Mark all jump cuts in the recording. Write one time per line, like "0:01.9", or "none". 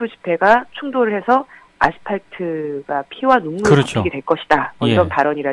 0:04.6